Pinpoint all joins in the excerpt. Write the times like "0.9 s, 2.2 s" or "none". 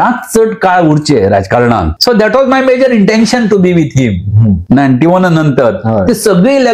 1.9 s, 4.6 s